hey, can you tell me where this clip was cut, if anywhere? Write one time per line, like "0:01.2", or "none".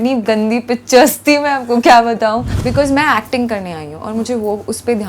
0:02.6